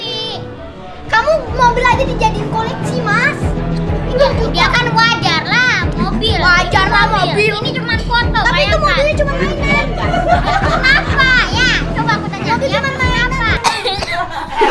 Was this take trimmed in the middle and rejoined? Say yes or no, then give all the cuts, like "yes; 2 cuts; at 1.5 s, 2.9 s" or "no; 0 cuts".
yes; 1 cut; at 13.6 s